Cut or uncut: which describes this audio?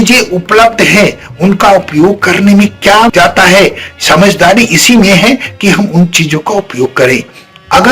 cut